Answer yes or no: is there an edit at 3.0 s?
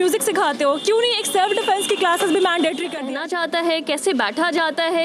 yes